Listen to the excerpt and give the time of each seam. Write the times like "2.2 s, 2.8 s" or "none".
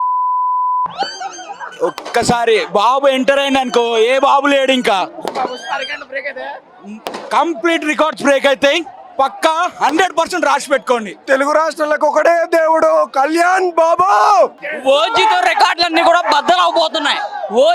11.2 s, 14.6 s